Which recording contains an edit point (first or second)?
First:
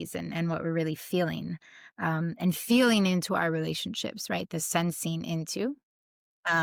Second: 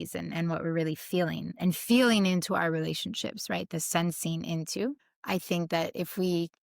second